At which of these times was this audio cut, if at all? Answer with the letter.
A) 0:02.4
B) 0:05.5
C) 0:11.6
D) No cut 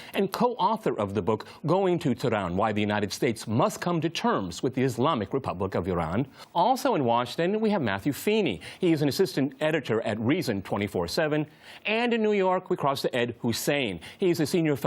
A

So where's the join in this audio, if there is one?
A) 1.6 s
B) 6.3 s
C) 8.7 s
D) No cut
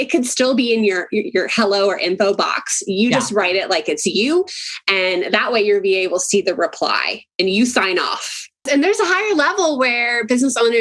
C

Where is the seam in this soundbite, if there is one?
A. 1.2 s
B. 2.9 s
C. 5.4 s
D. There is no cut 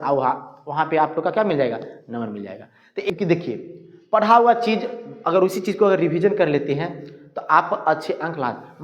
B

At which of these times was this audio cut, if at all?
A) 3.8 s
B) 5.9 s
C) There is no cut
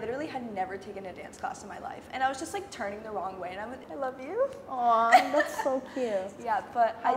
A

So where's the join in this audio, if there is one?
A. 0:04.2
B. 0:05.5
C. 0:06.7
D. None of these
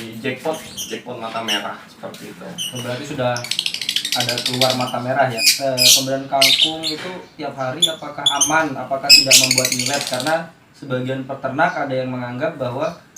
B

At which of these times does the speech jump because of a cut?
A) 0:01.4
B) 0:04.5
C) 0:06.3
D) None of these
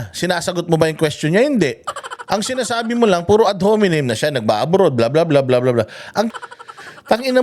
C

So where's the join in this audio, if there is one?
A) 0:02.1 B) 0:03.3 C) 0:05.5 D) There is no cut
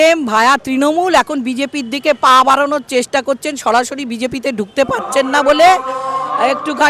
D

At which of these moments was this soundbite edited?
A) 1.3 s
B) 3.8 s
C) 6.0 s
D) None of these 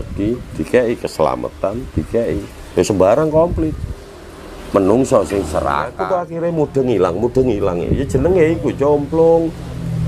C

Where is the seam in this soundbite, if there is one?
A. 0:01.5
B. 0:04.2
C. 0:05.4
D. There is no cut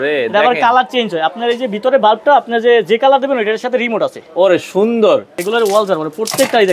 C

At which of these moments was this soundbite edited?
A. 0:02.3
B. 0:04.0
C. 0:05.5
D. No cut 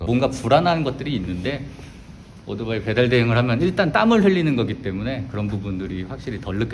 D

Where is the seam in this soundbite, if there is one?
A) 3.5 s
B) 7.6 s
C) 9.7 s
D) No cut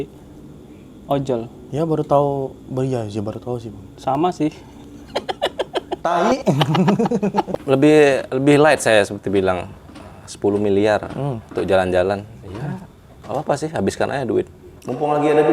B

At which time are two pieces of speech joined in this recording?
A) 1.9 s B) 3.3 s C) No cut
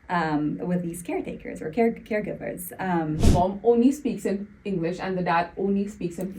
B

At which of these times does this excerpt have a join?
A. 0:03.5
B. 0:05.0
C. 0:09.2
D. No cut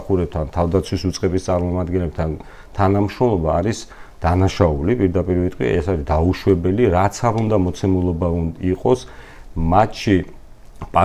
D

